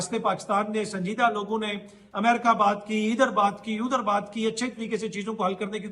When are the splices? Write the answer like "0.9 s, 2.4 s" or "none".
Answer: none